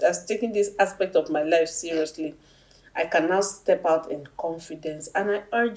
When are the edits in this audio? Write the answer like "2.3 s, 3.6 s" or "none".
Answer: none